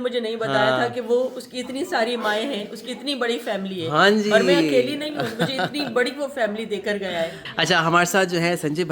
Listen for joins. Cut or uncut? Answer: uncut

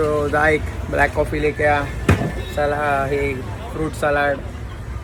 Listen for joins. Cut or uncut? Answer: uncut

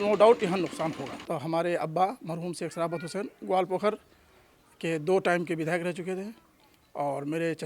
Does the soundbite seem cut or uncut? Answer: cut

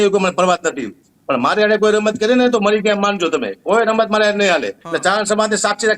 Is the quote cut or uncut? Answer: cut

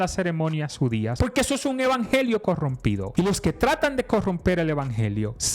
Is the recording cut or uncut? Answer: cut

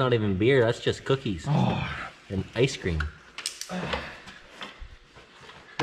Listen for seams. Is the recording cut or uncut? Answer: uncut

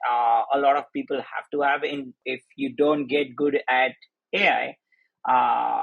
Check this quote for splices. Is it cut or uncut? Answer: cut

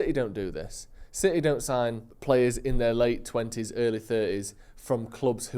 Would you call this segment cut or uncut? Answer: cut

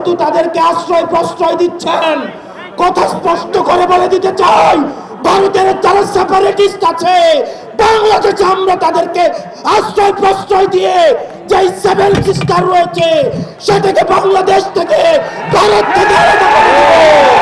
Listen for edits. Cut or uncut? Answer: uncut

